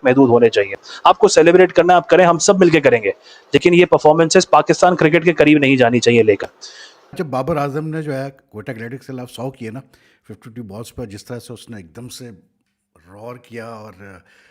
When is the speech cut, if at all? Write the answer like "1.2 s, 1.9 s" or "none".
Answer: 7.1 s